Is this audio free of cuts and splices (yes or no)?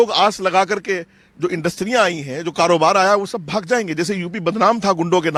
yes